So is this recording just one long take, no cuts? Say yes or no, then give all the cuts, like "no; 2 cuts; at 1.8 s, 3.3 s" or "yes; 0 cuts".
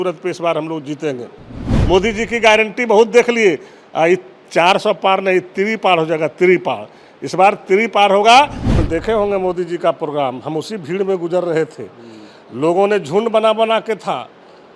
no; 2 cuts; at 1.7 s, 8.8 s